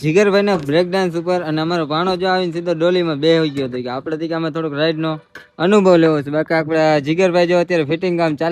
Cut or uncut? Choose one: uncut